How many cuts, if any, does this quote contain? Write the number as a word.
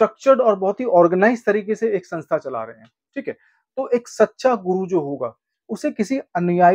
zero